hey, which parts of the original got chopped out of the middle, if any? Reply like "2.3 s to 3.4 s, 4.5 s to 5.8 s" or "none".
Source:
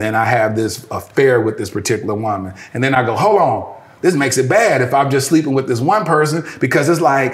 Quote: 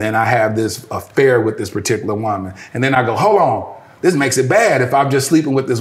none